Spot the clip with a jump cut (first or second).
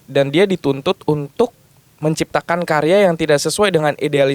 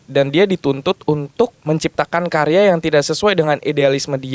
second